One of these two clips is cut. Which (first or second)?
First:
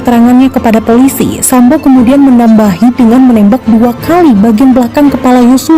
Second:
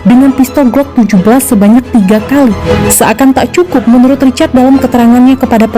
second